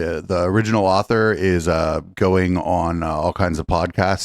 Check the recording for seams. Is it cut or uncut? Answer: uncut